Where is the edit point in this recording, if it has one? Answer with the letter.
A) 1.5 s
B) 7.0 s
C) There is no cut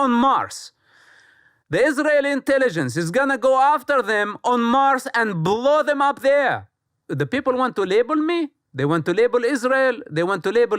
B